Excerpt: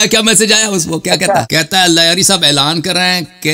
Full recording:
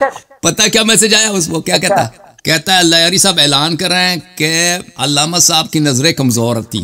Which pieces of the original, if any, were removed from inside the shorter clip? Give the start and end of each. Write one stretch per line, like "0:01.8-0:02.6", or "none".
0:02.1-0:02.4